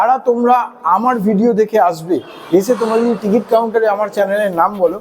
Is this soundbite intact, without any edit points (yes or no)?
yes